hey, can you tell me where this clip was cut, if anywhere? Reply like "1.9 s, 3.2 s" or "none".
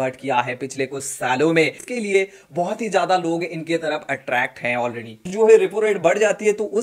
1.9 s, 5.3 s